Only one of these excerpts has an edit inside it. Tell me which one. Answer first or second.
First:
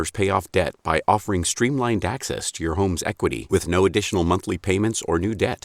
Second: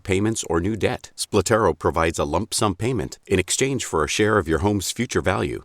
second